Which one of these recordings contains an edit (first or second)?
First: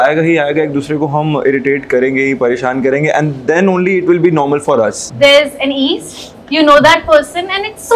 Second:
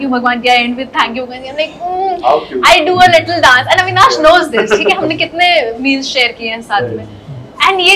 first